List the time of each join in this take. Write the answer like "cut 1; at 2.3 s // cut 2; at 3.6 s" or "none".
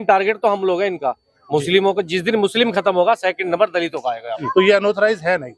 cut 1; at 4.3 s

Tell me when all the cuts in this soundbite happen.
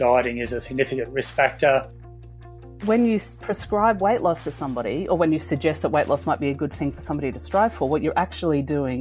cut 1; at 2.2 s

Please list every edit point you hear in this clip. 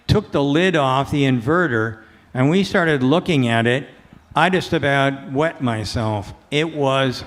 none

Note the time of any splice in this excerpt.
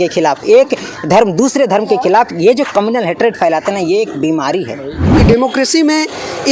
cut 1; at 5.2 s

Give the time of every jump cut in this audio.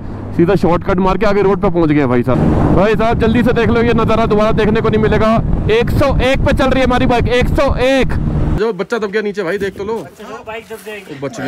cut 1; at 2.3 s // cut 2; at 8.6 s

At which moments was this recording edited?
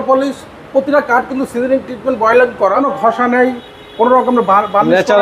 cut 1; at 2.9 s

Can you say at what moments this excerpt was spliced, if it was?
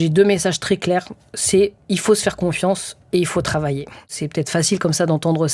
cut 1; at 4.1 s

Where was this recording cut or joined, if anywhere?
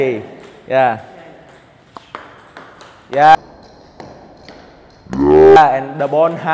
none

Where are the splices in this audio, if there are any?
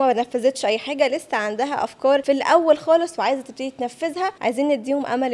cut 1; at 2.2 s // cut 2; at 4.3 s

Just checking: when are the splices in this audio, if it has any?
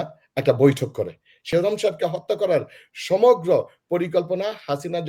cut 1; at 1.4 s

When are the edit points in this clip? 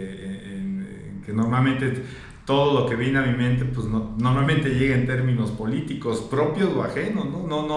none

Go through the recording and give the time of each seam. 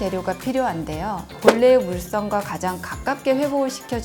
cut 1; at 1.4 s

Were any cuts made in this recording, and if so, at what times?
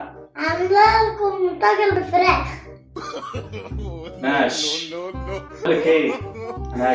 cut 1; at 1.9 s

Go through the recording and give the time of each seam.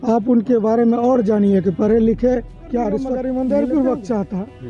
cut 1; at 3.1 s

